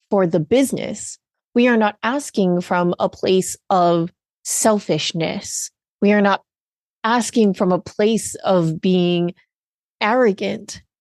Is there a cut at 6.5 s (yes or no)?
no